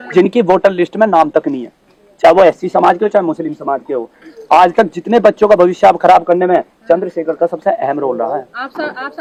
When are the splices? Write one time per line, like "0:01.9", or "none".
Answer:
none